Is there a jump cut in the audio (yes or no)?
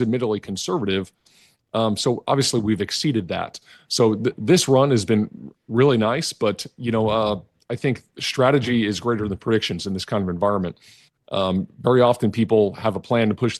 no